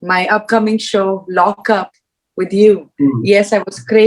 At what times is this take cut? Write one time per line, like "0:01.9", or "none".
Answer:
0:02.9